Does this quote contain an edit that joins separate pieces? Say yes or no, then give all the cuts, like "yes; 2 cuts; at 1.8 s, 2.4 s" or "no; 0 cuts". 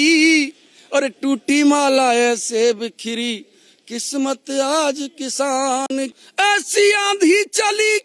yes; 1 cut; at 6.1 s